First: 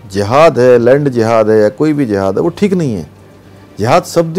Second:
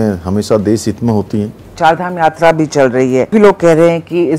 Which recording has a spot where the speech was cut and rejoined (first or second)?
second